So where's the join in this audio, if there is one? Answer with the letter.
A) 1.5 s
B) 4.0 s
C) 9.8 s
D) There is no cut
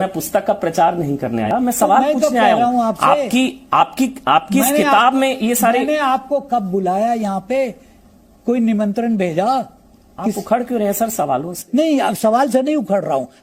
A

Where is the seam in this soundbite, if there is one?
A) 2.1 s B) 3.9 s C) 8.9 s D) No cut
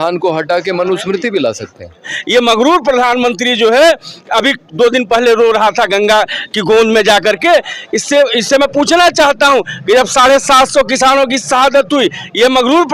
A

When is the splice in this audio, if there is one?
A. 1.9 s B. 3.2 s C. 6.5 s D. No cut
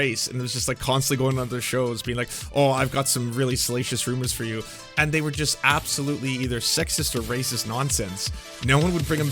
D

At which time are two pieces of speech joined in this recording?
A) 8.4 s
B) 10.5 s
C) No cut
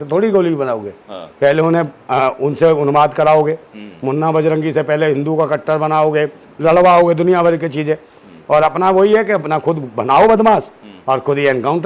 C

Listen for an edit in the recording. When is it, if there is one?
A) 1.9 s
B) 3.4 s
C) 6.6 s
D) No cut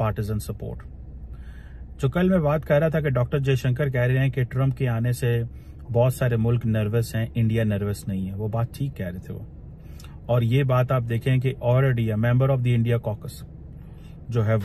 D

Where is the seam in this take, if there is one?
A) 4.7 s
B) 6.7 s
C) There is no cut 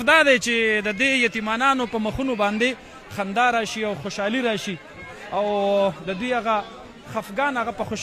C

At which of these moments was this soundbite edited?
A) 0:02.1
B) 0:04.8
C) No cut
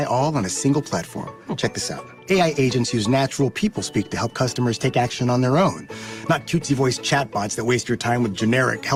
C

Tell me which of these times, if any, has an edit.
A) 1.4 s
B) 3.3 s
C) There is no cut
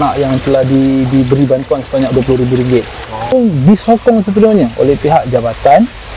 B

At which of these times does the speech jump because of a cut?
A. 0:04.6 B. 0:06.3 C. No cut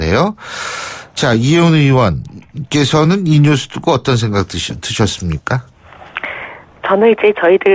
A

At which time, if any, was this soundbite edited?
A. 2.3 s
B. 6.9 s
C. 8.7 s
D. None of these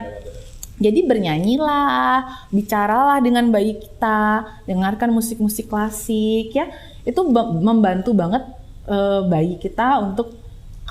D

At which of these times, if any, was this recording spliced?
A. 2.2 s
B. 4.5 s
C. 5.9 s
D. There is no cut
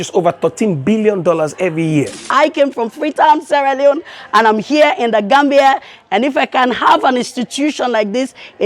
A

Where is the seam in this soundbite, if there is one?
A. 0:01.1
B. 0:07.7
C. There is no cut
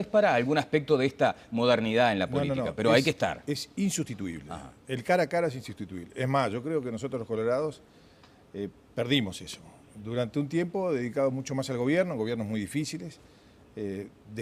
A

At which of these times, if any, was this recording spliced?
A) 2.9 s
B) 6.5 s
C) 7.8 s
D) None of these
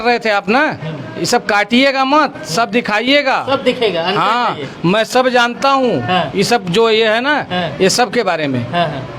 D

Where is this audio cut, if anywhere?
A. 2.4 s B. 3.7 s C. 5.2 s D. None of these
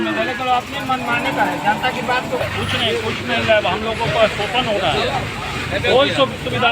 A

